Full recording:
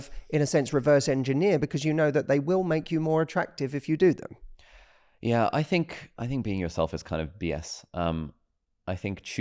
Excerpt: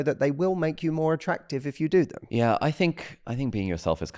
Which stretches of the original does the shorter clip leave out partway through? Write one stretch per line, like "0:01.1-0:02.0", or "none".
0:04.3-0:05.1

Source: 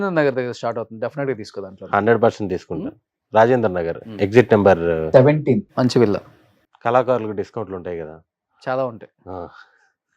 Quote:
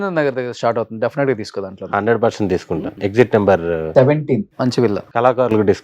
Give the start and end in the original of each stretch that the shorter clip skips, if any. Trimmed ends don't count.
0:02.9-0:04.1
0:06.2-0:06.7

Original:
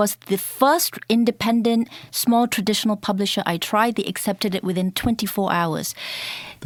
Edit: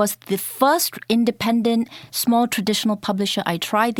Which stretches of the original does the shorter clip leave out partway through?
none

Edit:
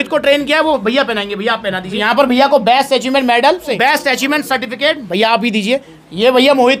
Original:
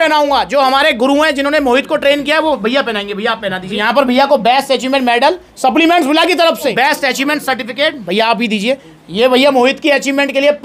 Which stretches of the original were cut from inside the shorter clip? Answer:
0:05.5-0:06.7

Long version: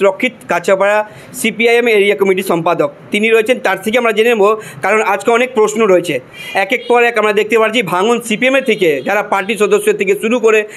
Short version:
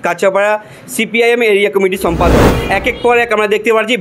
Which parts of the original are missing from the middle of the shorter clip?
0:03.0-0:06.4

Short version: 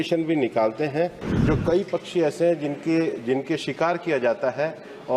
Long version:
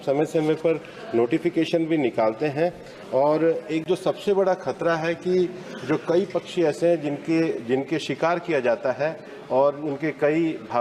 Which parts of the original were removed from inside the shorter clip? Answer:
0:02.9-0:05.7

